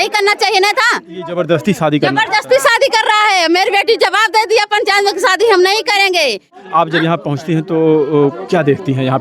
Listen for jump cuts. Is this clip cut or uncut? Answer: cut